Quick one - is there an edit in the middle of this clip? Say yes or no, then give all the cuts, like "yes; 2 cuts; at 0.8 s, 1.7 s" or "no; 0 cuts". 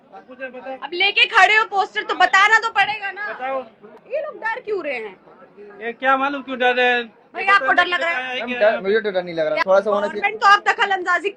yes; 2 cuts; at 4.0 s, 9.6 s